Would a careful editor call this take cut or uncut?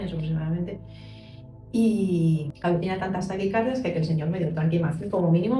cut